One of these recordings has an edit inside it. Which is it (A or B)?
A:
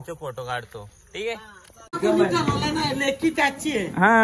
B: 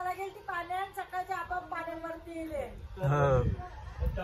A